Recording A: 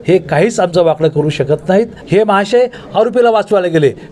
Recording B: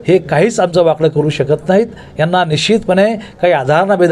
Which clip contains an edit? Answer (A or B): A